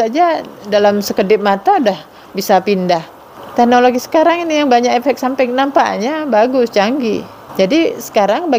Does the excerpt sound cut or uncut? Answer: cut